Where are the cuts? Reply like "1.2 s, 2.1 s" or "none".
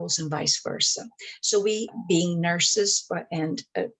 1.9 s